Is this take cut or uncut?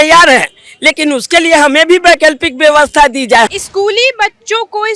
cut